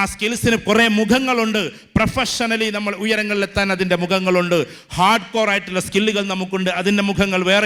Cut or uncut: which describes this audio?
uncut